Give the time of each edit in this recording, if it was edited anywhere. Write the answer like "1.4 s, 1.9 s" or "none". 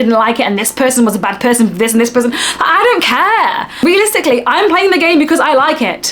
3.8 s